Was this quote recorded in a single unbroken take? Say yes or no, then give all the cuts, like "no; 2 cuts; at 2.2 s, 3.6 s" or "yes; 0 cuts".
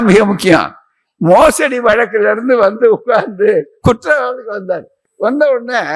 yes; 0 cuts